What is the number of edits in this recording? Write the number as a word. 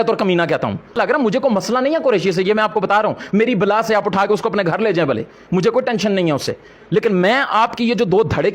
one